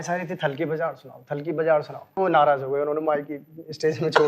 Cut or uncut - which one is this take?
cut